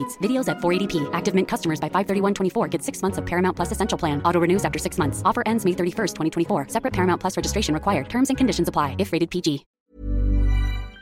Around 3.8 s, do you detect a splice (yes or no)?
no